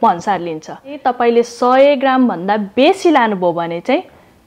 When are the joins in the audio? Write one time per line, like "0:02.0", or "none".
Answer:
0:01.0